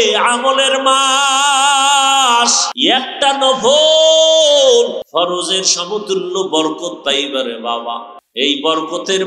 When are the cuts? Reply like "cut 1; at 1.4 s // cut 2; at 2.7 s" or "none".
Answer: cut 1; at 2.7 s // cut 2; at 5.0 s // cut 3; at 8.2 s